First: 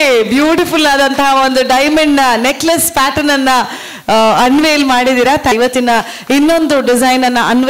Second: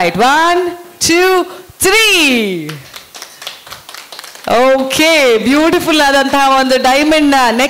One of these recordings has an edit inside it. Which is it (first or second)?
first